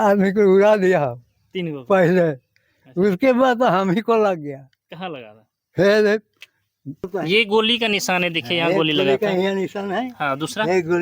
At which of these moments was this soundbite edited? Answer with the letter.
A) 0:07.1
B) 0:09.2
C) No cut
A